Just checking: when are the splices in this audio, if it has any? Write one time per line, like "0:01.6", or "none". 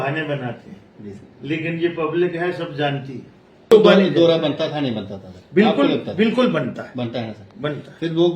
0:03.7